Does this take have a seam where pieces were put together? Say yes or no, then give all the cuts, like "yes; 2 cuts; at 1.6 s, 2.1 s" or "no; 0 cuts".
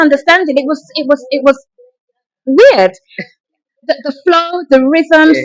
no; 0 cuts